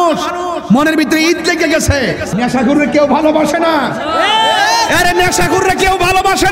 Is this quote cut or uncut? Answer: cut